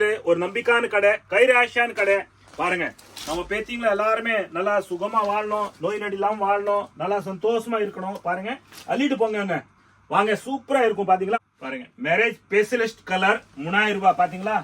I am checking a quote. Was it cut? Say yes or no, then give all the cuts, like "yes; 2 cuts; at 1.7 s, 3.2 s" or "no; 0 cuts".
yes; 1 cut; at 11.4 s